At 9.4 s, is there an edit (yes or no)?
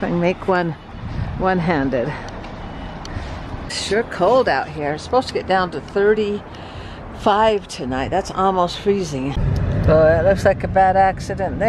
yes